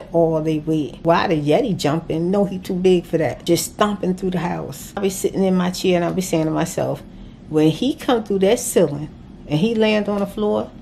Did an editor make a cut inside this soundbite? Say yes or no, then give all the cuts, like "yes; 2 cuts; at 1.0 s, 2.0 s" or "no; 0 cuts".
yes; 3 cuts; at 1.0 s, 3.4 s, 5.0 s